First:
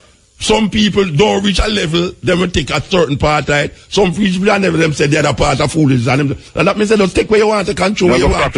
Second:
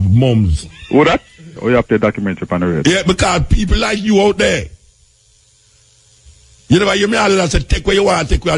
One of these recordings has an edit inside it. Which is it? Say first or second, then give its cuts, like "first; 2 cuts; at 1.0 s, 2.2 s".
second; 1 cut; at 1.5 s